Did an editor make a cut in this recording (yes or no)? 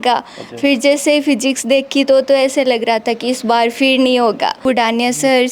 yes